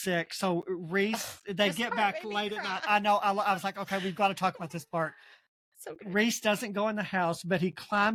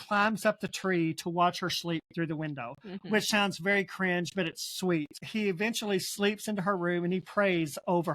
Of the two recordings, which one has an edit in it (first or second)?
second